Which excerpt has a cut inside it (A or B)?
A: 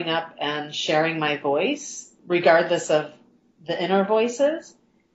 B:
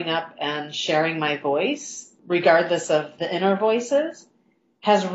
B